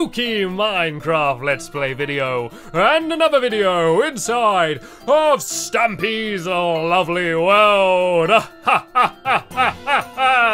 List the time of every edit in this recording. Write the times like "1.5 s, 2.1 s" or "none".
none